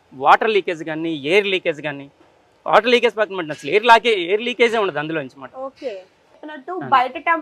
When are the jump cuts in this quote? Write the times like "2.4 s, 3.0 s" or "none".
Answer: 6.3 s